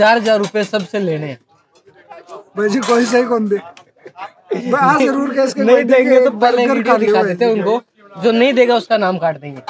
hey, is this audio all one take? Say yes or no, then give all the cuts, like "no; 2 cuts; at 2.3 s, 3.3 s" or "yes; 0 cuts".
yes; 0 cuts